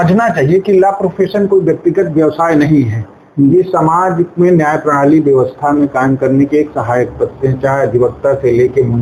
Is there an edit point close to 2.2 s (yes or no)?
no